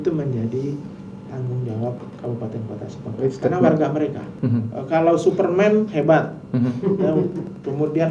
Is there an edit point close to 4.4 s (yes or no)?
yes